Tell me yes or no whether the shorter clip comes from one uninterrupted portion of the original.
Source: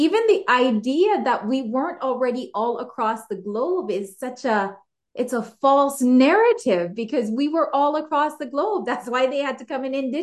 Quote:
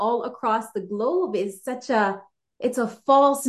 yes